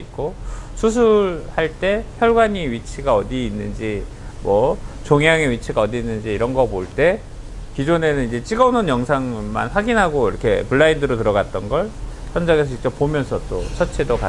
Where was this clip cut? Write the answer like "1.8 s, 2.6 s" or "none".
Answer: none